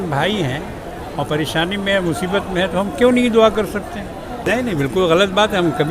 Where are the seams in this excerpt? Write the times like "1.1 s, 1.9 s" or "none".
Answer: 4.7 s